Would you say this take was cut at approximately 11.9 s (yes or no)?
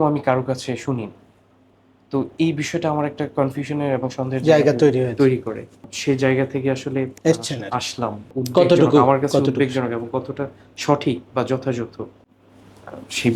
no